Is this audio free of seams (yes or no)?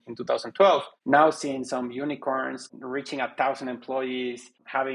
yes